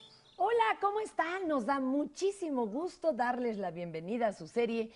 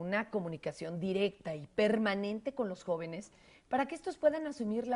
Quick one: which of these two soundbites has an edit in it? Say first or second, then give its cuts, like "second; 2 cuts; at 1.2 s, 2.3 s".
first; 1 cut; at 1.3 s